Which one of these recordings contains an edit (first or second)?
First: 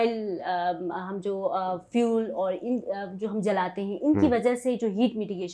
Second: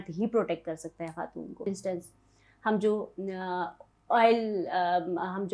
second